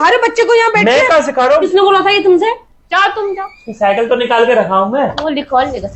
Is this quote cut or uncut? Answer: cut